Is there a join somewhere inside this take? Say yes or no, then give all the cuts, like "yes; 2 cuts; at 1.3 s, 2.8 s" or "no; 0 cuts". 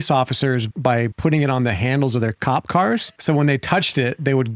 yes; 2 cuts; at 0.7 s, 2.6 s